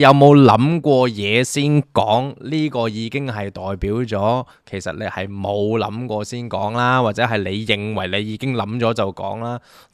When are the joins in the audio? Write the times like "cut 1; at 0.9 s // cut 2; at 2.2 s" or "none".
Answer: none